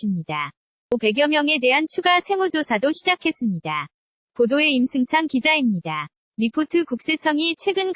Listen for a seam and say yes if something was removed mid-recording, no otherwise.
yes